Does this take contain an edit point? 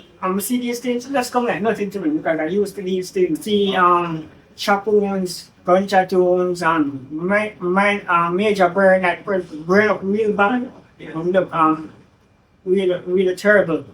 yes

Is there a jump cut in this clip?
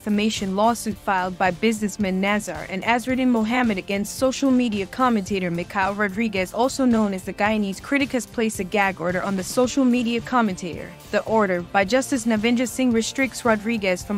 no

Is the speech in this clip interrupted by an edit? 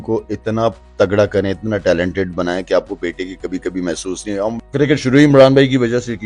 yes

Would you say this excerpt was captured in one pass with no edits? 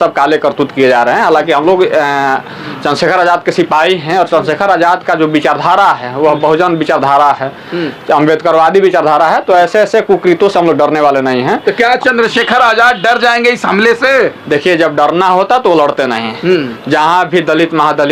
yes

